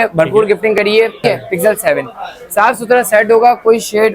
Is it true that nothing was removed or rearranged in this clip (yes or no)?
no